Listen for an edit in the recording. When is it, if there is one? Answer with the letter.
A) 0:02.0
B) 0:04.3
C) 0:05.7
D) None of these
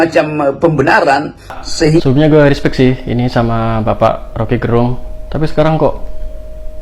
A